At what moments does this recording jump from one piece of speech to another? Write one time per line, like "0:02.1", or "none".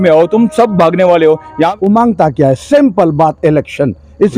0:01.7

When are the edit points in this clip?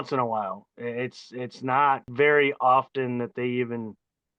0:02.1

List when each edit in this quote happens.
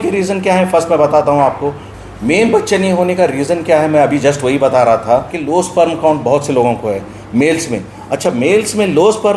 0:01.9
0:05.3

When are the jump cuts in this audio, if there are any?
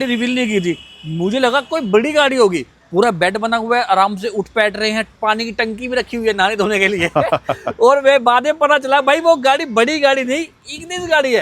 none

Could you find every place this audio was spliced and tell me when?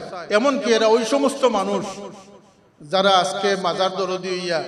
none

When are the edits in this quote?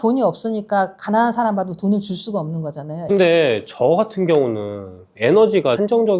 0:02.9

